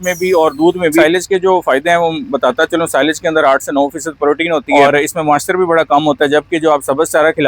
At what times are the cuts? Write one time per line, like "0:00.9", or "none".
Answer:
0:01.1
0:04.6